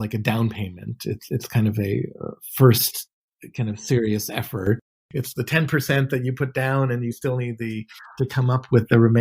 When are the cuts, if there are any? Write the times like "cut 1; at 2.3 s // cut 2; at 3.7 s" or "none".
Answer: cut 1; at 4.8 s

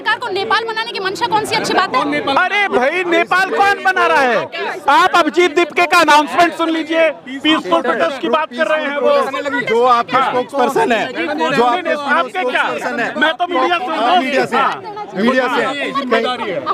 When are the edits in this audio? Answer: none

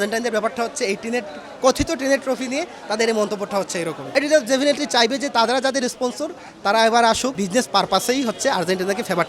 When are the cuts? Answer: cut 1; at 4.0 s // cut 2; at 7.4 s

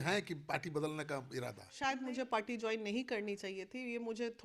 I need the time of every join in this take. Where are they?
cut 1; at 1.6 s

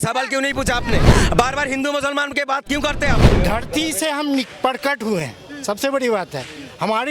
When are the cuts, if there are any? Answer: cut 1; at 1.1 s // cut 2; at 3.2 s

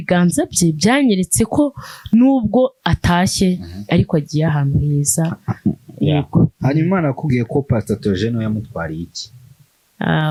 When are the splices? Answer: none

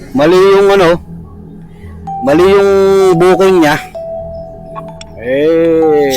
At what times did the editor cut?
cut 1; at 3.8 s // cut 2; at 5.2 s

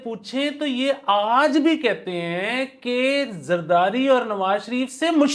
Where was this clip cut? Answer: none

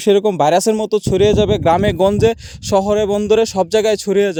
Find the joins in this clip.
none

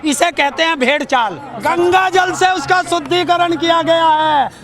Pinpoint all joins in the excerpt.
cut 1; at 1.5 s

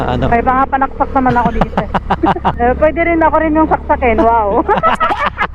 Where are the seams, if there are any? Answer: cut 1; at 2.5 s

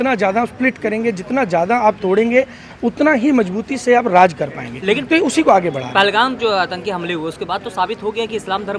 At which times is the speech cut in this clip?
none

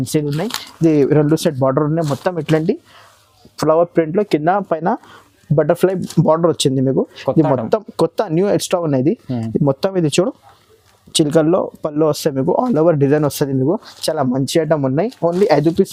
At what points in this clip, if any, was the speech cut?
none

